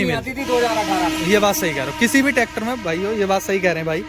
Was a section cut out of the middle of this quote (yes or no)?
no